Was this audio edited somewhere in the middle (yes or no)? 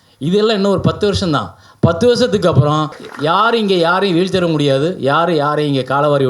yes